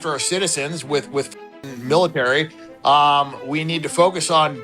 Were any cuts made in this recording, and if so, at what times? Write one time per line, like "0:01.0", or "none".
0:02.6